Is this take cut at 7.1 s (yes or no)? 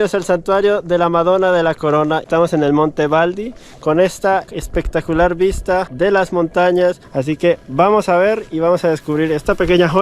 yes